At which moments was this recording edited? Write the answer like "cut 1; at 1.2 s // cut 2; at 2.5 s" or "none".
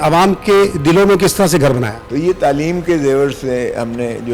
cut 1; at 2.0 s